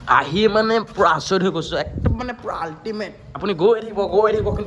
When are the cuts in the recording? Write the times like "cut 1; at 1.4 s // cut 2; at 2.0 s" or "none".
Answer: cut 1; at 3.4 s